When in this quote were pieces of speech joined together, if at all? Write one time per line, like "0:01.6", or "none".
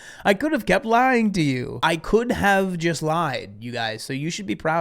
0:01.7